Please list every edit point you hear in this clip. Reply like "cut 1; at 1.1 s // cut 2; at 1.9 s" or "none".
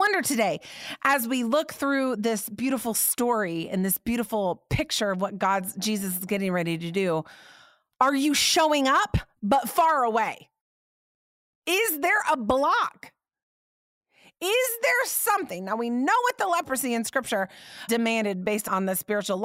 none